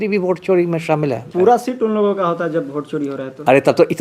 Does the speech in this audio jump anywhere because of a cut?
yes; 1 cut; at 1.3 s

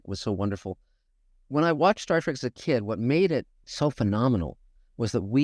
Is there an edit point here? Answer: yes; 1 cut; at 3.6 s

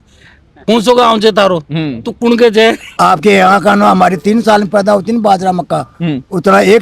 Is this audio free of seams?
no; 1 cut; at 2.9 s

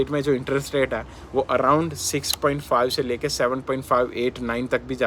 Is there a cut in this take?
no; 0 cuts

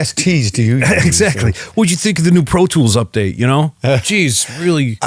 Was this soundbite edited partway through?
no; 0 cuts

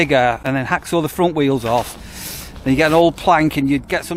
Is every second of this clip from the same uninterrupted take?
yes; 0 cuts

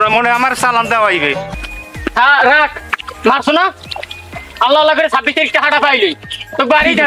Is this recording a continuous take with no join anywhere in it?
no; 1 cut; at 1.5 s

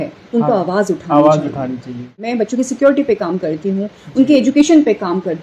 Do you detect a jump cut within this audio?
yes; 1 cut; at 2.2 s

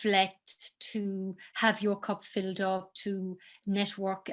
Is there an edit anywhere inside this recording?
no; 0 cuts

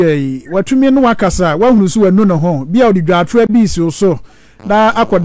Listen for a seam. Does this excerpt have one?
no; 0 cuts

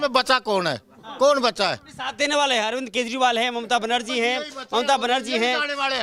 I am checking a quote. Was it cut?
no; 0 cuts

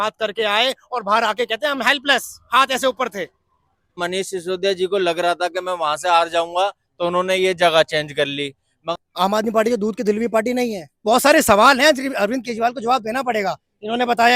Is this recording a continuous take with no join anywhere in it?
no; 3 cuts; at 4.0 s, 9.0 s, 11.0 s

